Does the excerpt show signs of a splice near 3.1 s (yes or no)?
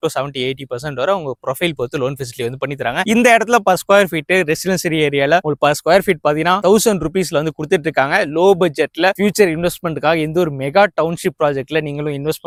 no